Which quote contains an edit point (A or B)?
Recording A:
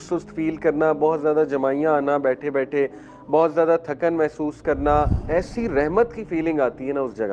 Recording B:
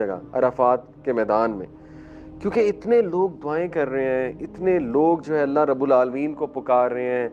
A